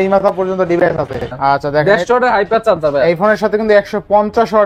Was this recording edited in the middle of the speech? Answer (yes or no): yes